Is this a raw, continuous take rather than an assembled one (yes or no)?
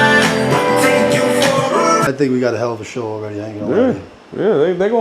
no